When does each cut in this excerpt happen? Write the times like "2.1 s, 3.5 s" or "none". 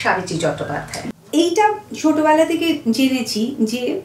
1.1 s